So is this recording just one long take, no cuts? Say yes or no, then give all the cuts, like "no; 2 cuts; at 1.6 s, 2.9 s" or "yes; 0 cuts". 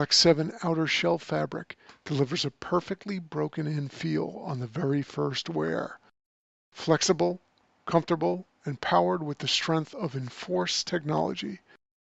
yes; 0 cuts